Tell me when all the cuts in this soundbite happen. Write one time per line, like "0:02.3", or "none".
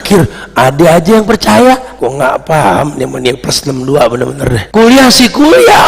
0:01.9
0:04.6

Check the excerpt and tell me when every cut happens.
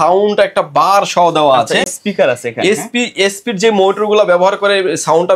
none

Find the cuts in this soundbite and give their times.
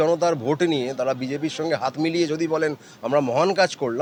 none

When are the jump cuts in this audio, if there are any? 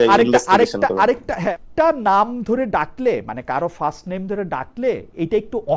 0:01.5

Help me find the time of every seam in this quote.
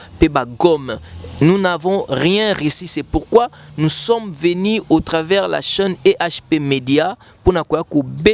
none

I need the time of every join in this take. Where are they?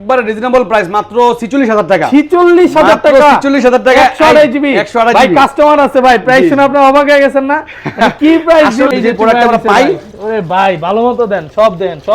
0:08.9

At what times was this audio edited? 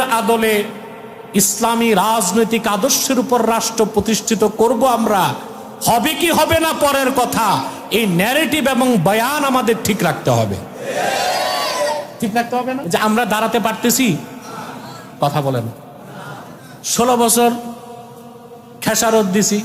0:12.8

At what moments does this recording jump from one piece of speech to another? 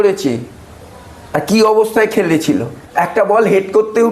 0:02.8

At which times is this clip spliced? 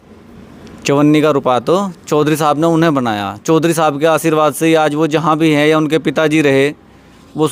none

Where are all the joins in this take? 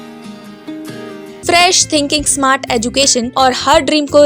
0:01.3
0:03.3

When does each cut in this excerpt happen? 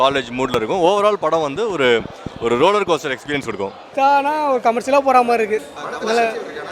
0:03.8

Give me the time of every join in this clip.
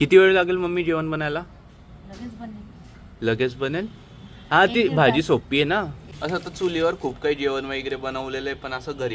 0:06.0

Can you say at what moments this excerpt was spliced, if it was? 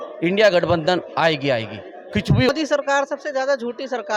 0:02.5

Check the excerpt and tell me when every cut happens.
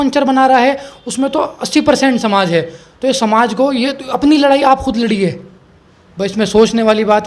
none

